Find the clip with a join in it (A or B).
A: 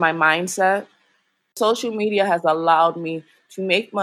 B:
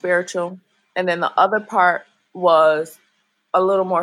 A